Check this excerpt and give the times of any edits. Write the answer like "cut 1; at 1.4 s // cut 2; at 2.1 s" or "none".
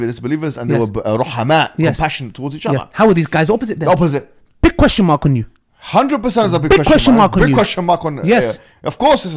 none